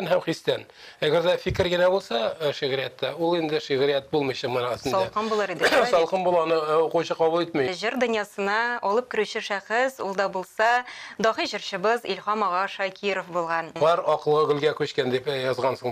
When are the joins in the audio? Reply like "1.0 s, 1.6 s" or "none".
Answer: 7.8 s, 13.7 s